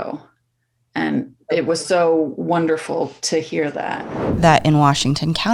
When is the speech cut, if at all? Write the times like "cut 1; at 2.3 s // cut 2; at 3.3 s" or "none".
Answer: cut 1; at 4.2 s